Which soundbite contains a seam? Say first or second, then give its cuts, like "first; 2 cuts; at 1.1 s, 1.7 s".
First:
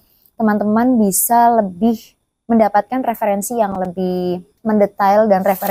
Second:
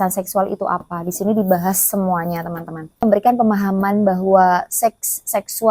second; 1 cut; at 3.0 s